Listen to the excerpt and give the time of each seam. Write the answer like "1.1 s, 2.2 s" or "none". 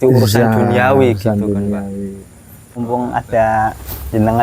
2.8 s